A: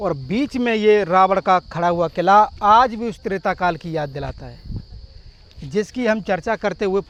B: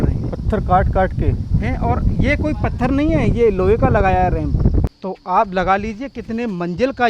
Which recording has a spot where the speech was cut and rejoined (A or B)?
B